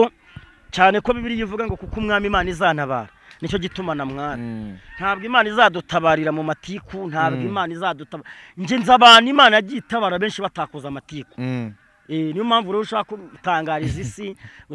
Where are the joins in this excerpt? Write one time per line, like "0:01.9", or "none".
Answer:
none